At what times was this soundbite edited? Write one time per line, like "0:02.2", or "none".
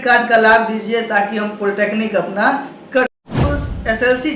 0:03.3